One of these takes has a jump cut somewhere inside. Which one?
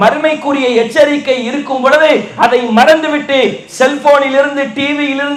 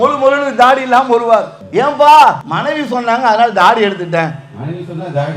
second; 2 cuts; at 1.6 s, 2.5 s

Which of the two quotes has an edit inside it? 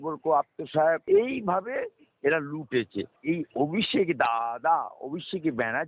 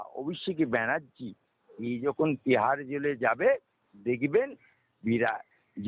first; 2 cuts; at 1.0 s, 3.1 s

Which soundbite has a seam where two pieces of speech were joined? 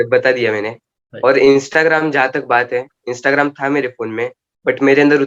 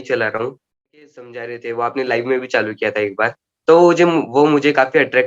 second; 1 cut; at 1.0 s

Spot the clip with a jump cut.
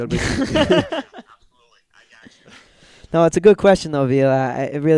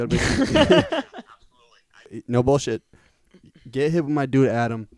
second; 1 cut; at 2.2 s

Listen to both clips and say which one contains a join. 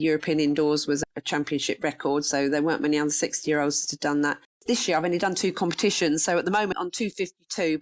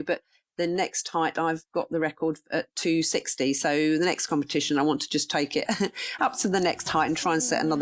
first; 3 cuts; at 1.0 s, 4.5 s, 6.7 s

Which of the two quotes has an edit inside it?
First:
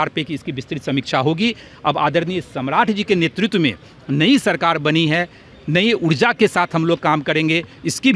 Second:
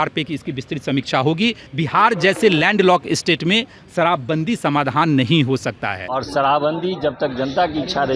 second; 2 cuts; at 1.7 s, 6.2 s

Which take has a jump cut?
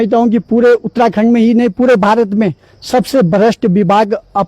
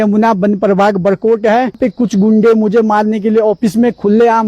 second; 1 cut; at 1.8 s

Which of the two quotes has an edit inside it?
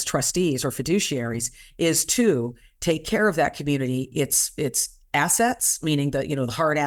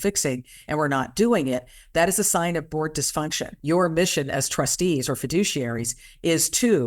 second; 1 cut; at 3.5 s

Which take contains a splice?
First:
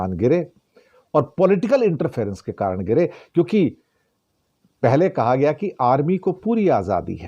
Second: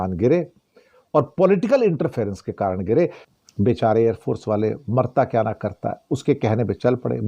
second; 1 cut; at 3.2 s

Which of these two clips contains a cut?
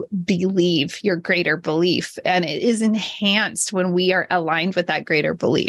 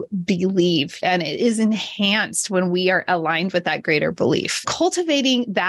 second; 2 cuts; at 0.9 s, 4.7 s

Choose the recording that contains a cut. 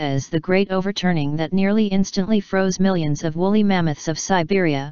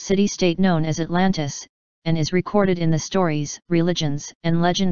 first; 1 cut; at 3.6 s

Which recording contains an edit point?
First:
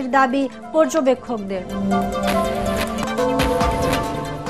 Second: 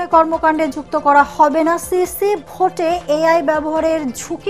first; 1 cut; at 3.1 s

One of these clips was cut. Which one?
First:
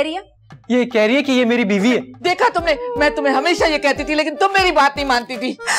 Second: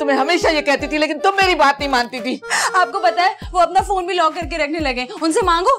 first; 1 cut; at 2.1 s

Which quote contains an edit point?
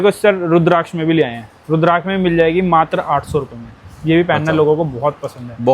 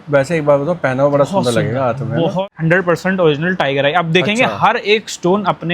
second; 1 cut; at 2.4 s

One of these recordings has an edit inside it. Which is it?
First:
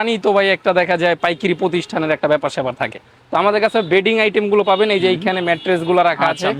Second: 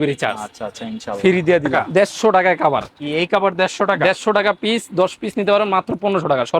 second; 1 cut; at 1.7 s

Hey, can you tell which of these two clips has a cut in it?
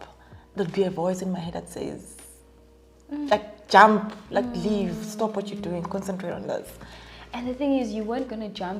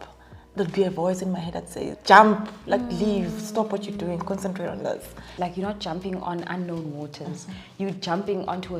second; 2 cuts; at 1.9 s, 5.2 s

